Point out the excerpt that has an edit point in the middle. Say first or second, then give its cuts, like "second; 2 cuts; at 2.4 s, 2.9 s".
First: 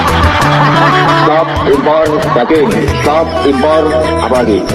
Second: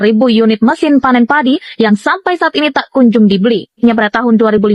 second; 1 cut; at 3.8 s